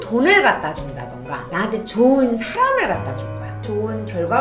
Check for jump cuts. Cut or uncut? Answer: cut